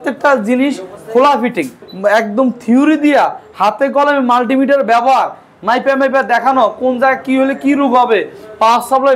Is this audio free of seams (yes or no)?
no